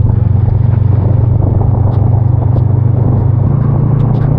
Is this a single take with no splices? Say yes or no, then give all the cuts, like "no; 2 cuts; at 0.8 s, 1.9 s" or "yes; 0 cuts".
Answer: no; 1 cut; at 3.5 s